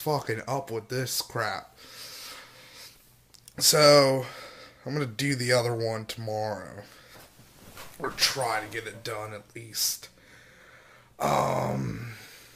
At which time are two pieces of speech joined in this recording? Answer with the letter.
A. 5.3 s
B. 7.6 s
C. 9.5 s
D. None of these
D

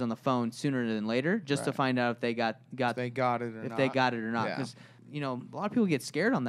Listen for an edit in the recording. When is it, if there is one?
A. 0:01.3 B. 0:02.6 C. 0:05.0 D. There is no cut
C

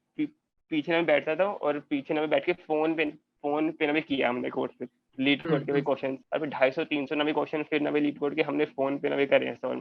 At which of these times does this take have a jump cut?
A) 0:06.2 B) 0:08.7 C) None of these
C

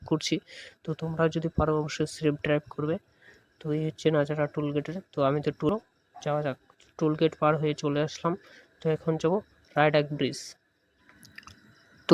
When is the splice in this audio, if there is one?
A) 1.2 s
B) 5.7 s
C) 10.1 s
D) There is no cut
B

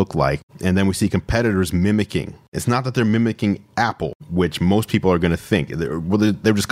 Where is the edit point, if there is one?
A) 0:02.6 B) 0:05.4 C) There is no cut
A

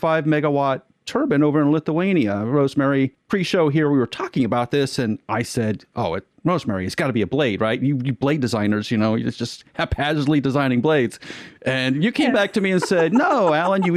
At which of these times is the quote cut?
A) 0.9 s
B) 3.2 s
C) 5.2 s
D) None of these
B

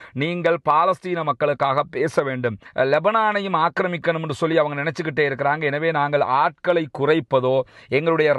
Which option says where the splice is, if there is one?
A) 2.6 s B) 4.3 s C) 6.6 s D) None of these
A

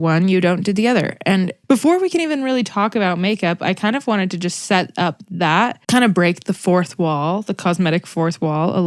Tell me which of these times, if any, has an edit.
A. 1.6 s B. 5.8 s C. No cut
B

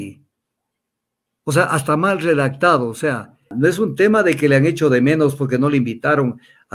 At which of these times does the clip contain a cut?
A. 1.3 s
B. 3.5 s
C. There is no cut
B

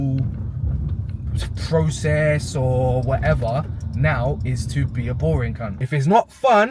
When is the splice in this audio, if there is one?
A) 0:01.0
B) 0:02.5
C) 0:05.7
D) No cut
C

